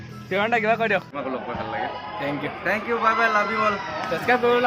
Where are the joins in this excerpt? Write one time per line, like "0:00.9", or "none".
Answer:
0:01.1